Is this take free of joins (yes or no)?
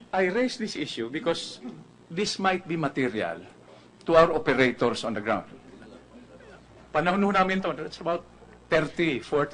no